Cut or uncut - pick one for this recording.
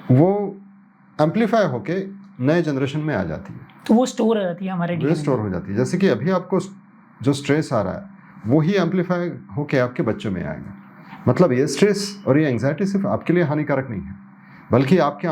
uncut